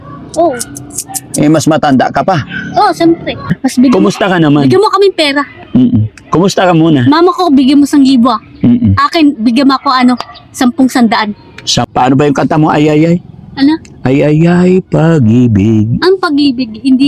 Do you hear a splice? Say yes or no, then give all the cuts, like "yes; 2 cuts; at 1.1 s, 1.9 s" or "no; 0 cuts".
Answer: yes; 2 cuts; at 3.5 s, 11.8 s